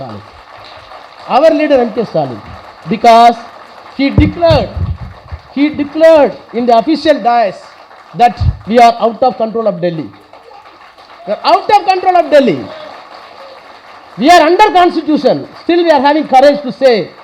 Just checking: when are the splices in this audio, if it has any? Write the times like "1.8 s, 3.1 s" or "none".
none